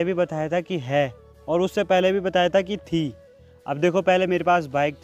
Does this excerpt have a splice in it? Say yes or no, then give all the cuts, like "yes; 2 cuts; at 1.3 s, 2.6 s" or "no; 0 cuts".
no; 0 cuts